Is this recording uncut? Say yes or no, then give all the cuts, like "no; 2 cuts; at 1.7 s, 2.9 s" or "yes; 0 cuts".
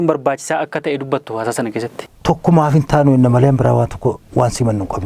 no; 1 cut; at 2.0 s